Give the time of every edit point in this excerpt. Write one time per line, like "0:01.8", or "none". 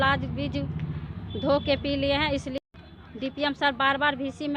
0:02.6